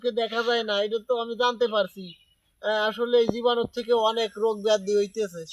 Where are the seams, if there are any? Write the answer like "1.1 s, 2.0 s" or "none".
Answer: none